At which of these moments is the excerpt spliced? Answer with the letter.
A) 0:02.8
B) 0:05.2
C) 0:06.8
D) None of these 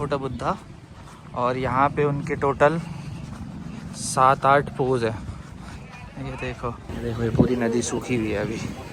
C